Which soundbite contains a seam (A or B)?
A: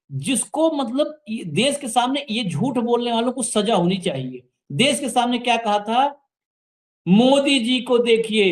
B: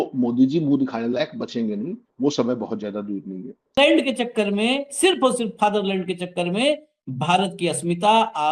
B